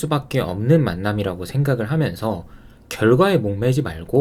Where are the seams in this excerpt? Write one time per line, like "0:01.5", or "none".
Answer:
none